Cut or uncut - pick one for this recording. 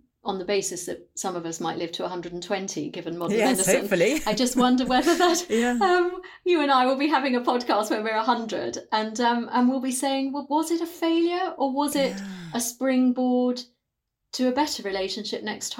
uncut